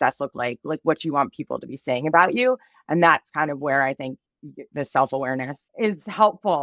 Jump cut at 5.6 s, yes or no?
yes